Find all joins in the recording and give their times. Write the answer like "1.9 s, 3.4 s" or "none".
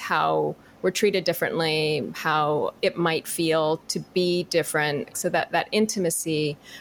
2.7 s, 3.9 s, 5.1 s